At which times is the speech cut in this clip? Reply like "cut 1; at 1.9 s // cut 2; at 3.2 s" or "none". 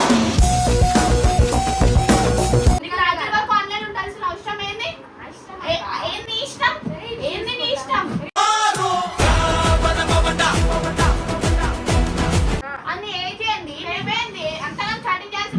cut 1; at 2.8 s // cut 2; at 12.7 s